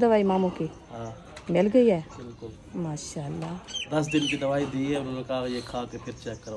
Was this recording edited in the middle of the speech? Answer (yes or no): yes